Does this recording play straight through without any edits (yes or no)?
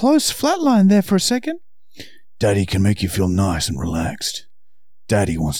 yes